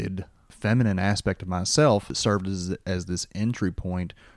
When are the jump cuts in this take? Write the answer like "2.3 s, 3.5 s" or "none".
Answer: 2.2 s